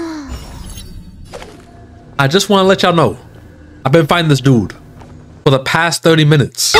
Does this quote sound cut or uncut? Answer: cut